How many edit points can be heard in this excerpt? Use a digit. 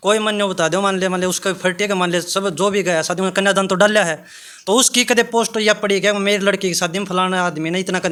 0